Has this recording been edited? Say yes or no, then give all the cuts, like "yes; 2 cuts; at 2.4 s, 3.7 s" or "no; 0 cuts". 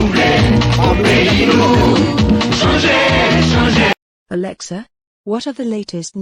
yes; 1 cut; at 3.9 s